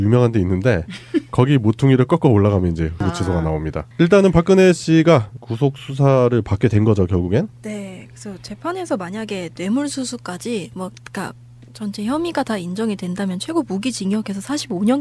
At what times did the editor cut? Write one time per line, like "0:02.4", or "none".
none